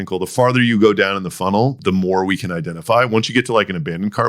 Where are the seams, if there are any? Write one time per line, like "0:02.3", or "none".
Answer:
0:01.8